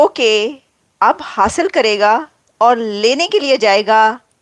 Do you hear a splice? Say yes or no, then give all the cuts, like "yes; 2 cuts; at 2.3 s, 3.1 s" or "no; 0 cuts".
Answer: no; 0 cuts